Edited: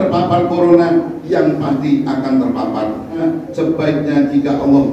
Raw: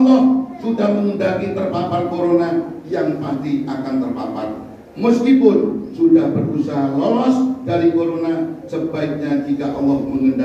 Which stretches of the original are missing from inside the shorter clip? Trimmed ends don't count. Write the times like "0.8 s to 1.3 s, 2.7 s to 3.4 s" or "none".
4.8 s to 8.3 s